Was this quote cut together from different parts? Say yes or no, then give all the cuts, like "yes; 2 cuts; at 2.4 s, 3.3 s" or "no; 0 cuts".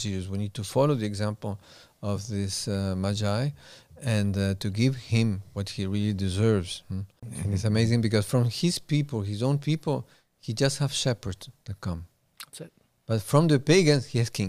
yes; 1 cut; at 7.3 s